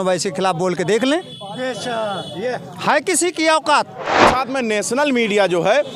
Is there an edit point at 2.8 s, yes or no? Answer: no